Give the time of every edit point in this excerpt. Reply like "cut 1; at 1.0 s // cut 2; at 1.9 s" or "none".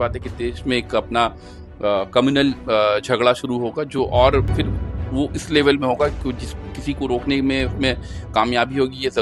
none